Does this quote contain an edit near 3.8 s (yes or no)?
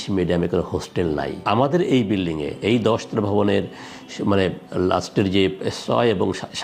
no